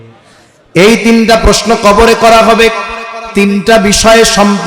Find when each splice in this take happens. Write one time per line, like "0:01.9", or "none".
0:03.3